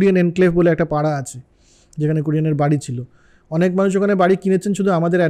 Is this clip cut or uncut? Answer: uncut